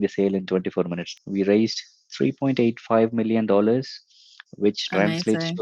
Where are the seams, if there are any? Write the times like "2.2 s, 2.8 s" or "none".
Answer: 1.1 s